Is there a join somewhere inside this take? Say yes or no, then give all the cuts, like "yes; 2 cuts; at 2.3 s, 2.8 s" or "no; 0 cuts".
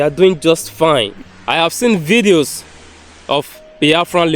yes; 1 cut; at 1.1 s